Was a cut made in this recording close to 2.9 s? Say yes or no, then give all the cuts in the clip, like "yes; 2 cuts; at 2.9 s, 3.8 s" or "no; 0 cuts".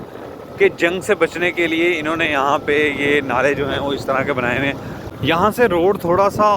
no; 1 cut; at 5.1 s